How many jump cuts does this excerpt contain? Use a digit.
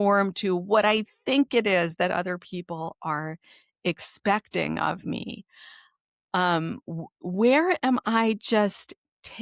0